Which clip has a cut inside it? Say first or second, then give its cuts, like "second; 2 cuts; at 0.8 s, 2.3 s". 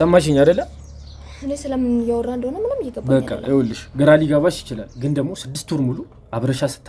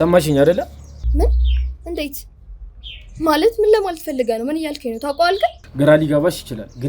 second; 2 cuts; at 1.0 s, 5.6 s